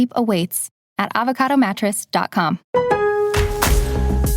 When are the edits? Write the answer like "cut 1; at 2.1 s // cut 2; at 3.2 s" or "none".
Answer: cut 1; at 2.6 s